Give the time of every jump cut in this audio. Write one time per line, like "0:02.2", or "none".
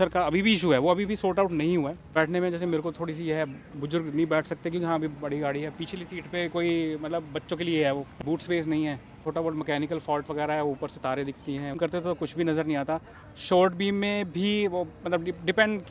0:02.2
0:08.2
0:09.2
0:11.8

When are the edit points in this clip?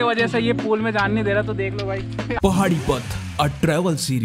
0:02.4

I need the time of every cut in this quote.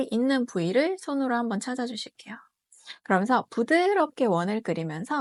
none

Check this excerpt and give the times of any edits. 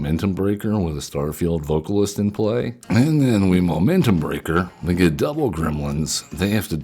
0:02.8
0:04.7

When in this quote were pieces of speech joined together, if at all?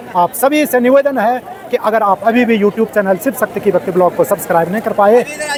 none

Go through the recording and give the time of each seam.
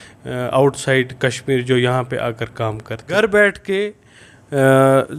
0:03.1

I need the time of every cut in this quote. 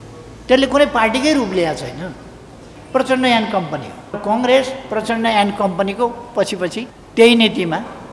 0:04.2
0:06.9

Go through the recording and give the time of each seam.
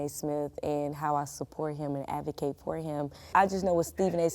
0:03.3

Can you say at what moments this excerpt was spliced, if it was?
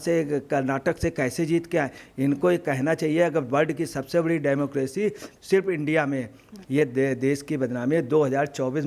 0:06.5

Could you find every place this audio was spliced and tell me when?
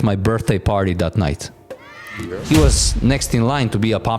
0:02.3

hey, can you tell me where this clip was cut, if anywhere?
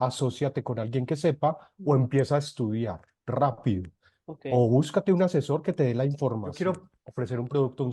0:06.5

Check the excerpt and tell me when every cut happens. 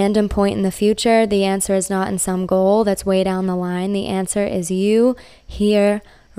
none

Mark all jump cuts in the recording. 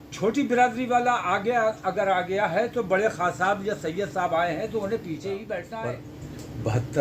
0:05.7

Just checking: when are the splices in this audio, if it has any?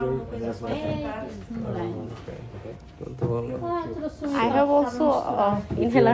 none

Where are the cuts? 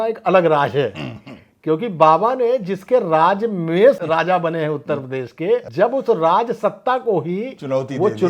0:04.0
0:05.7

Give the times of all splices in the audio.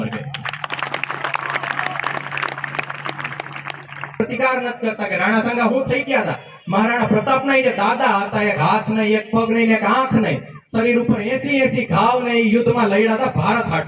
0:04.2

